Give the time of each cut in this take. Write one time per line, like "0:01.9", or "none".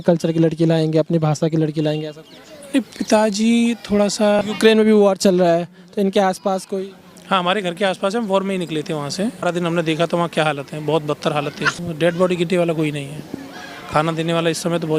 0:04.4
0:09.4
0:11.7